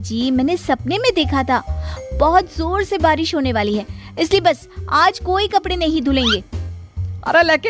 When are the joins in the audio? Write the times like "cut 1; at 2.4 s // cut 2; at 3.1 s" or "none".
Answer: none